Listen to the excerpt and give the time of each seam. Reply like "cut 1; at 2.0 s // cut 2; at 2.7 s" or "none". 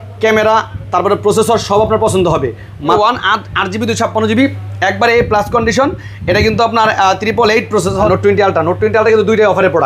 cut 1; at 3.0 s // cut 2; at 8.1 s